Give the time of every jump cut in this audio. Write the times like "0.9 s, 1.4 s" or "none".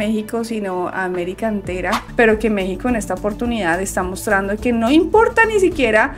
2.1 s